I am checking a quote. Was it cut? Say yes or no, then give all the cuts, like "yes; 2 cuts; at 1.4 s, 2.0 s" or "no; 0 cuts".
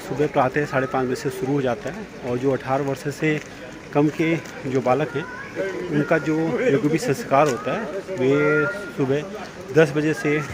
no; 0 cuts